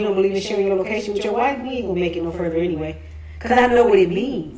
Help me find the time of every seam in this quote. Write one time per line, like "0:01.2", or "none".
0:03.6